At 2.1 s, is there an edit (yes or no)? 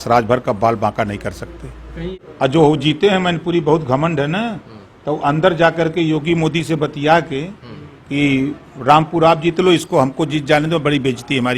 yes